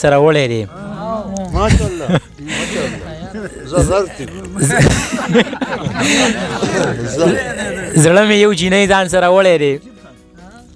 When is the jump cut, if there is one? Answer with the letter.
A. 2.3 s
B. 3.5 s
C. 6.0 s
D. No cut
D